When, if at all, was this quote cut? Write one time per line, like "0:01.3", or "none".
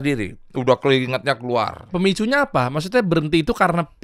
0:01.9